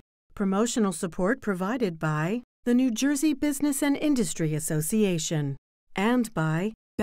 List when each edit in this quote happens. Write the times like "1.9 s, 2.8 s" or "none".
none